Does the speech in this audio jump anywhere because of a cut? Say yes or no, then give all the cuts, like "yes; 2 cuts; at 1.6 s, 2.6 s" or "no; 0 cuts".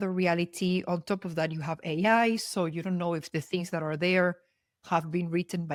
no; 0 cuts